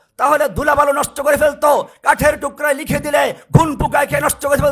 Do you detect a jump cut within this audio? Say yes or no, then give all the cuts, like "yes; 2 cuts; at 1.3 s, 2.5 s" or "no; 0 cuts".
no; 0 cuts